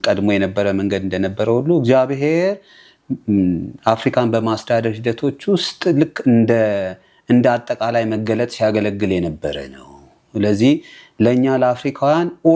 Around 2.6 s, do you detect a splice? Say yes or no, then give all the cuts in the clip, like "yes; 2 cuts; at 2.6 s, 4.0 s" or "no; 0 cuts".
no; 0 cuts